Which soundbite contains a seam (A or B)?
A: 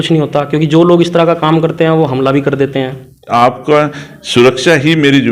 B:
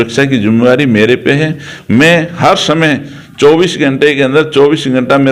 A